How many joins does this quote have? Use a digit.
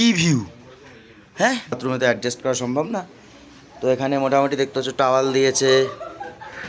1